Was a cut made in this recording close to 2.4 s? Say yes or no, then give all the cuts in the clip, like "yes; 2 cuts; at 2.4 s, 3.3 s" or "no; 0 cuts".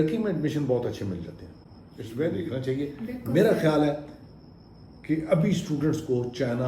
yes; 1 cut; at 2.4 s